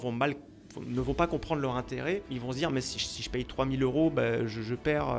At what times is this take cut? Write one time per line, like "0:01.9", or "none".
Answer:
0:02.3